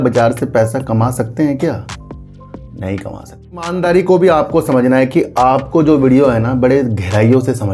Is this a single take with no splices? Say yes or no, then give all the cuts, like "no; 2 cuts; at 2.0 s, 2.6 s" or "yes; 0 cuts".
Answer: no; 1 cut; at 3.7 s